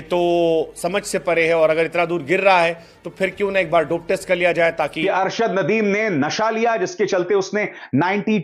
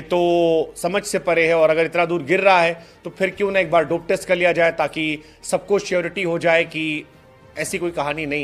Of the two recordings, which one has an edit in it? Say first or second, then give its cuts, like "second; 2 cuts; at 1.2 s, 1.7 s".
first; 1 cut; at 5.0 s